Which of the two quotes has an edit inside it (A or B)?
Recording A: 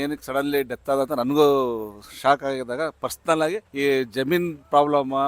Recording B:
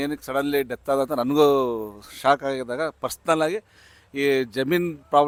A